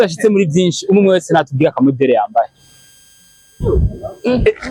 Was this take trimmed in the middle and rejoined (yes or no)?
no